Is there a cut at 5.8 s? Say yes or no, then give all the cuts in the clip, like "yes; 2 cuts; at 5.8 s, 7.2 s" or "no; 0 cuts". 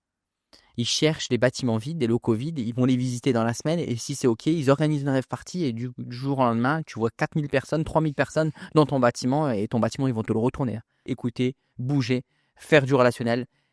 no; 1 cut; at 11.1 s